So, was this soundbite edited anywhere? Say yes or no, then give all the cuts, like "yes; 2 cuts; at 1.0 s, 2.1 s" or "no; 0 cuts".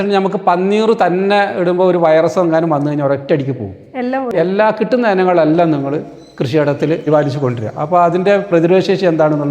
yes; 2 cuts; at 4.3 s, 7.1 s